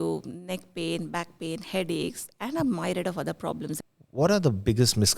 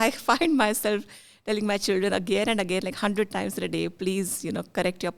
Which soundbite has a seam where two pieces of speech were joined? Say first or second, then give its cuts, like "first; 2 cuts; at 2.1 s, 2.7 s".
first; 1 cut; at 3.8 s